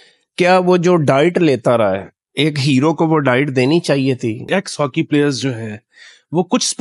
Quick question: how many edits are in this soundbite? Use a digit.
1